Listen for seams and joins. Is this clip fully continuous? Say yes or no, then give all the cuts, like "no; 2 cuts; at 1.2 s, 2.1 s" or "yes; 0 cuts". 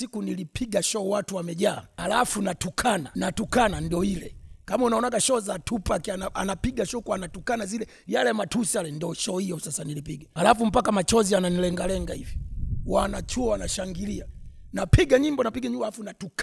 no; 3 cuts; at 1.9 s, 3.1 s, 10.2 s